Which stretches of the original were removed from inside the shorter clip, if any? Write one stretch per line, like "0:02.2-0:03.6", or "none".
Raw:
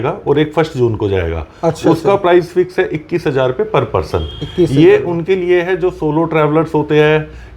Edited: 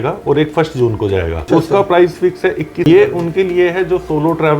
0:01.4-0:01.8
0:03.2-0:04.8